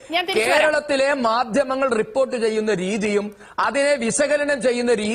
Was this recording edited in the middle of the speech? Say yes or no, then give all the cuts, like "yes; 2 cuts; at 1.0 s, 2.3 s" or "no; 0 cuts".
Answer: no; 0 cuts